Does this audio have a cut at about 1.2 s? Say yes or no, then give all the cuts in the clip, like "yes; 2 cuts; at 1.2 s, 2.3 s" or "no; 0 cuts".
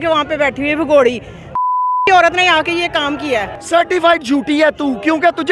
no; 1 cut; at 3.6 s